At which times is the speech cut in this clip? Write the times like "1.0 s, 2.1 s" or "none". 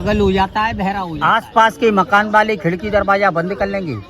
1.1 s